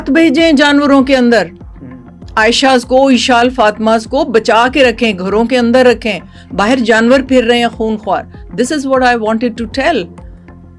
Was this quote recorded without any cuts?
yes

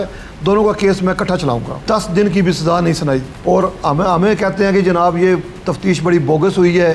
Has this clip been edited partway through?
yes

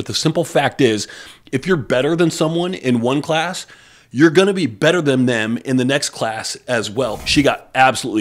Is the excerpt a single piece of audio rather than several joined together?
no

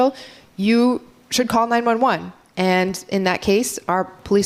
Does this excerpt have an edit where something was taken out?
no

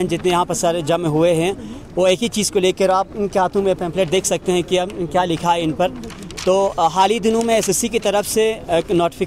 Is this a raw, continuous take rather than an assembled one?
yes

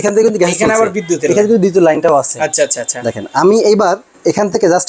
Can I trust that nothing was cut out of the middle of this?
yes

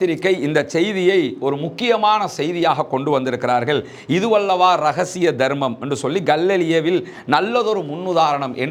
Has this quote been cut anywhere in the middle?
no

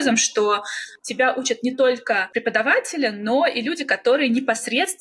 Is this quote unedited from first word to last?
yes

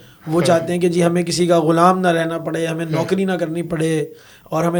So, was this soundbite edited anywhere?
no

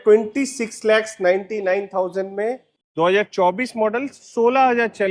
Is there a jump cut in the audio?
yes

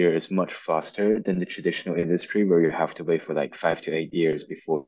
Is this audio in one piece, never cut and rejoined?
yes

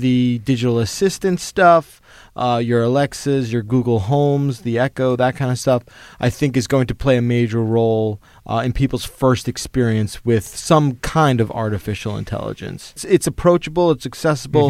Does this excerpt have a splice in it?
no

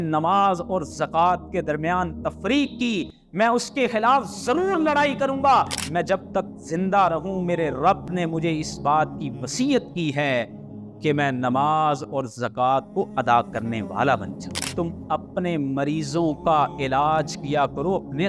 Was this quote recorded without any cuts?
no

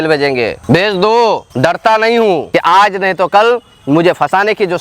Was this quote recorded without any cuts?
no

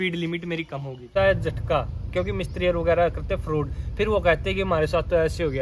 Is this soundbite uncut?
no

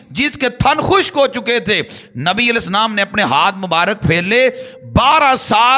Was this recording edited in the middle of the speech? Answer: no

